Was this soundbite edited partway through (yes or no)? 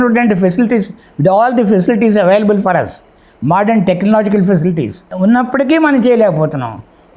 yes